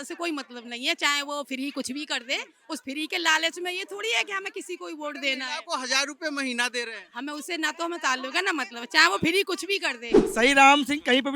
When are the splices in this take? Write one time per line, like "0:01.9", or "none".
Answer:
0:10.2